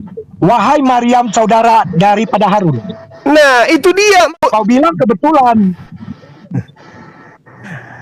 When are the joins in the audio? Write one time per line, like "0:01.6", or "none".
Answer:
0:04.4